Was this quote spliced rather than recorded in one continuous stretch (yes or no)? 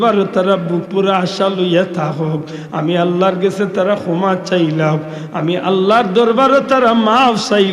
no